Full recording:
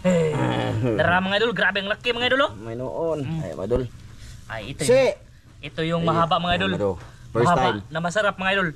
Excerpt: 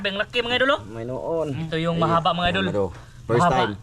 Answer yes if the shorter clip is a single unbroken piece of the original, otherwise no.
no